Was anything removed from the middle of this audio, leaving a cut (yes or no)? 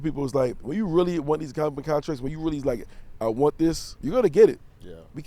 yes